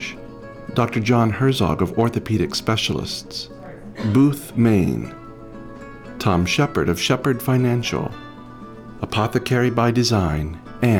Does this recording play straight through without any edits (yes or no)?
yes